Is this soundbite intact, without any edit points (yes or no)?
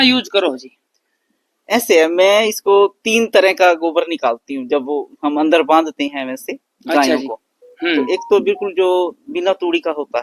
yes